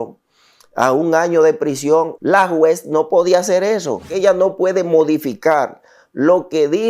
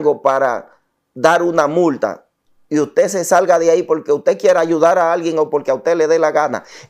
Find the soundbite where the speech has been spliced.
first; 2 cuts; at 2.1 s, 4.1 s

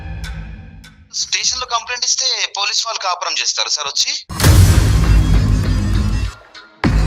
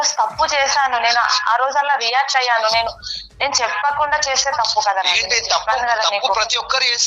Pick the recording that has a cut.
first; 2 cuts; at 1.3 s, 4.2 s

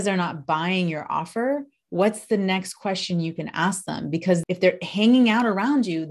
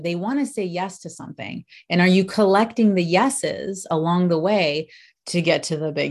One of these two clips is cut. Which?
first; 1 cut; at 4.4 s

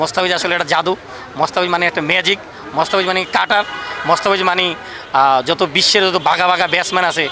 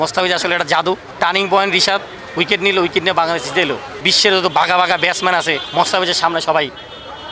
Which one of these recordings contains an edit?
second; 3 cuts; at 1.1 s, 4.1 s, 5.6 s

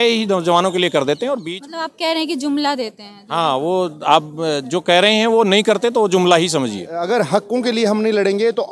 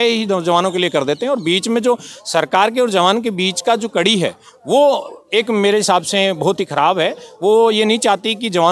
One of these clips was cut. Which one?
first; 2 cuts; at 1.4 s, 7.0 s

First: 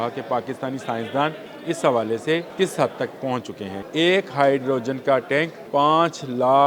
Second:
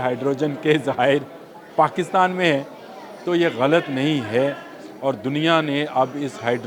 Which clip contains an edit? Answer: first; 4 cuts; at 1.5 s, 2.5 s, 3.7 s, 5.6 s

